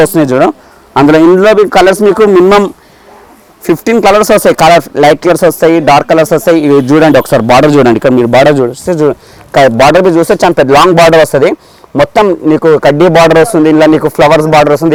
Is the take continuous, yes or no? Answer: yes